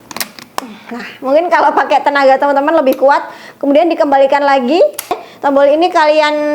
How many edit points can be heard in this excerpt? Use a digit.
1